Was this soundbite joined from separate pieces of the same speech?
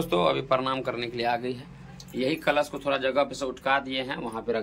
no; 0 cuts

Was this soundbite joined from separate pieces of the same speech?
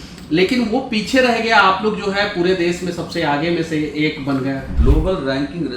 yes; 1 cut; at 4.7 s

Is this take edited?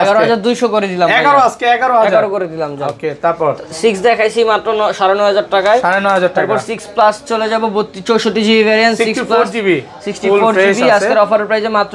no; 0 cuts

